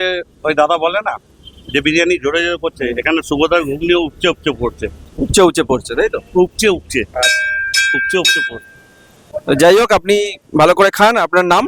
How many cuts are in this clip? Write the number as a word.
zero